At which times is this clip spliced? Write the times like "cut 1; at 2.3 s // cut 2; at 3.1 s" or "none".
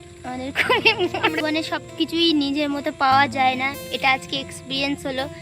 cut 1; at 1.4 s